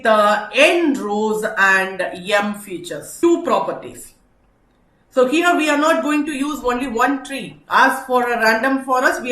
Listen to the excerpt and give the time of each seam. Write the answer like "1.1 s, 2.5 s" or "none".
3.1 s